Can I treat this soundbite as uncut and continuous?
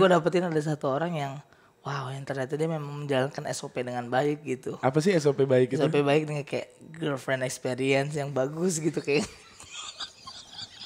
yes; 0 cuts

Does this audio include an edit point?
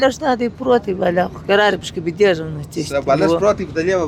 no; 0 cuts

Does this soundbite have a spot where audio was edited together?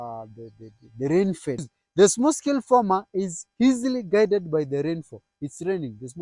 yes; 1 cut; at 1.7 s

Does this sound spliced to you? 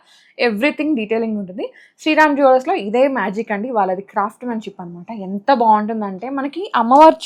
no; 0 cuts

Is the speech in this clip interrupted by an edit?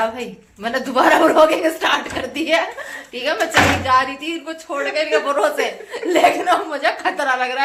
no; 0 cuts

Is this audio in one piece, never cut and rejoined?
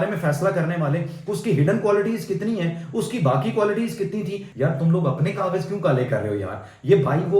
no; 1 cut; at 4.4 s

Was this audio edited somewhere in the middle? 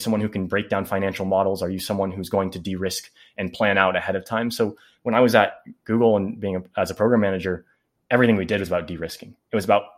no; 0 cuts

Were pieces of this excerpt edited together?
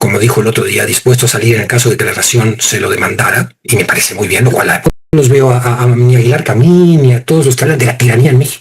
yes; 1 cut; at 5.1 s

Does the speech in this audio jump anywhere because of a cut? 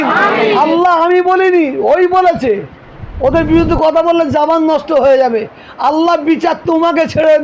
no; 0 cuts

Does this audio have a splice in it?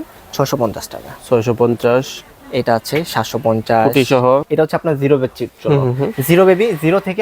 yes; 1 cut; at 4.5 s

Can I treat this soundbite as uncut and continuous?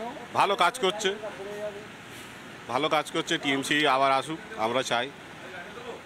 yes; 0 cuts

